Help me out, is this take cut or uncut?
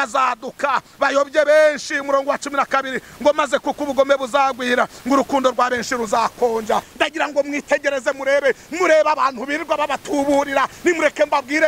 cut